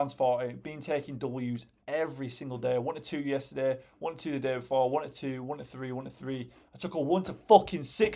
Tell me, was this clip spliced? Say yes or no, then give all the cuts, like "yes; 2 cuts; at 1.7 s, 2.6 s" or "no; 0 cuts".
no; 0 cuts